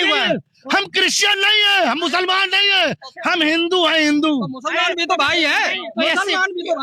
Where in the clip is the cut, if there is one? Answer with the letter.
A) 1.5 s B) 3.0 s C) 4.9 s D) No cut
D